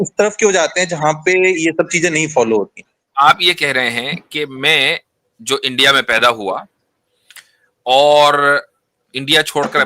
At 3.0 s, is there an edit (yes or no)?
yes